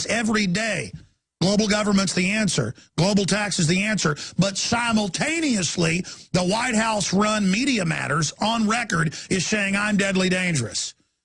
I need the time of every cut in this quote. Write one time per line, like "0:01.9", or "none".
none